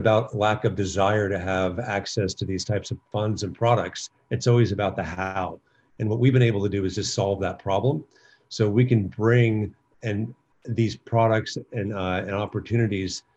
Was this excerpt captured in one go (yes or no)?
no